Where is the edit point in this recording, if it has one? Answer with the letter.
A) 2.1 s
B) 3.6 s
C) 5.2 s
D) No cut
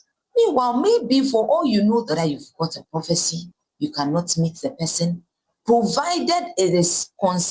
A